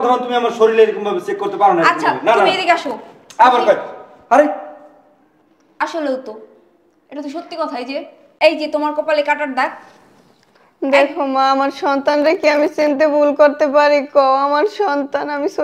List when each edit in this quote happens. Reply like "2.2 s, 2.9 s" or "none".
none